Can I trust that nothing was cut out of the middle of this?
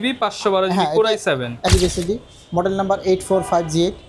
no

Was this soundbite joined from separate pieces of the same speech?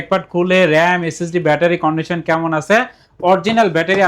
no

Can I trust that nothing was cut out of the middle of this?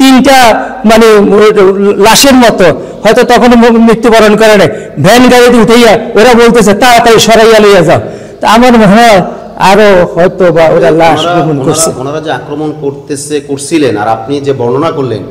yes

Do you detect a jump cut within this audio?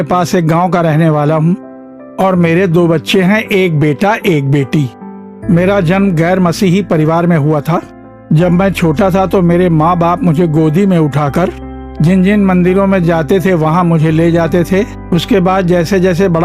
no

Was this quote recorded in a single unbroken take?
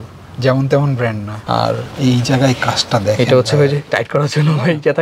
no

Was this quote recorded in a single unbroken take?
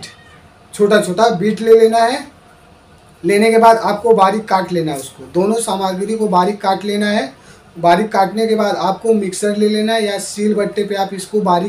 yes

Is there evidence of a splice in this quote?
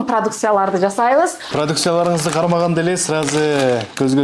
yes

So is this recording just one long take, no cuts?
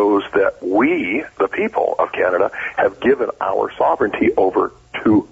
yes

